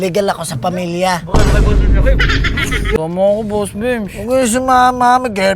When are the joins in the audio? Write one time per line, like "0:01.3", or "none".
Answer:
0:03.0